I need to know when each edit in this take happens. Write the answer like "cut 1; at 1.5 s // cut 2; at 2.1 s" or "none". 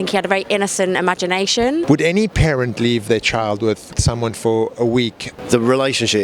cut 1; at 1.9 s // cut 2; at 3.9 s // cut 3; at 5.3 s